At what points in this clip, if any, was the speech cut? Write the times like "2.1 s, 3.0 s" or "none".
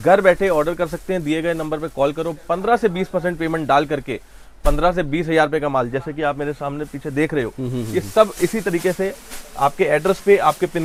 none